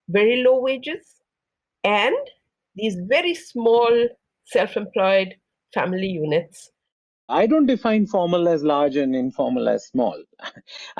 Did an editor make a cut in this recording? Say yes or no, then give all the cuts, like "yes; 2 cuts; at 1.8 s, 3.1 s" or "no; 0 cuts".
yes; 1 cut; at 7.1 s